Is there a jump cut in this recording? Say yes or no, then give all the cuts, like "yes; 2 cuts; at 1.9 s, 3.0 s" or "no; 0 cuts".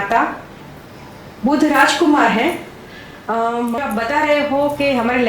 yes; 1 cut; at 3.8 s